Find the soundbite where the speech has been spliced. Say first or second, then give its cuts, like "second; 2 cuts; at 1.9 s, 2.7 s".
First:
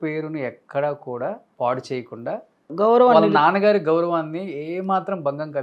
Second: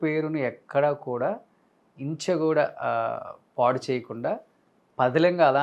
first; 2 cuts; at 1.5 s, 2.7 s